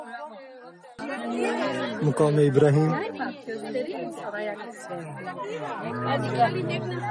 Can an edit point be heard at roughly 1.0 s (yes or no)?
yes